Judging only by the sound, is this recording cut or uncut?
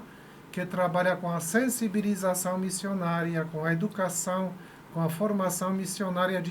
uncut